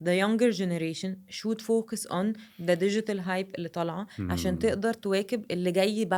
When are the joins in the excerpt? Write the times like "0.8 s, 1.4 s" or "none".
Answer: none